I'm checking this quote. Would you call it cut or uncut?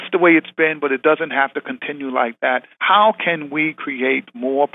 cut